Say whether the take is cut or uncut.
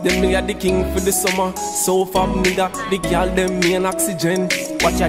uncut